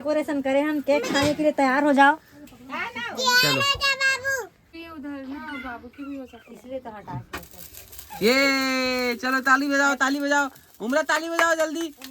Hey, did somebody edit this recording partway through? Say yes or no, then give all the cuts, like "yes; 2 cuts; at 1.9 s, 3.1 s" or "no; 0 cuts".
yes; 1 cut; at 4.7 s